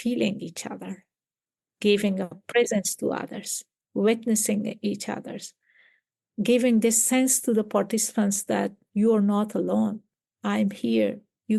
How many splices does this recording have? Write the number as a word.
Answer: zero